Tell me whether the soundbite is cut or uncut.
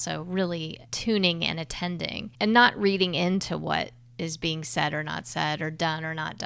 cut